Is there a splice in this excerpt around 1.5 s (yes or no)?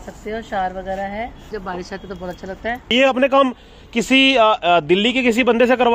yes